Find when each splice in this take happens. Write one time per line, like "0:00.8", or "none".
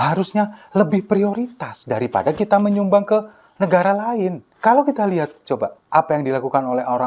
0:04.5
0:05.8